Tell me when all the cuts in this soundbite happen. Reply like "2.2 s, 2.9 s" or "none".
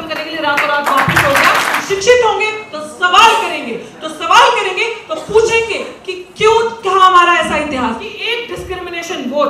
1.8 s, 8.1 s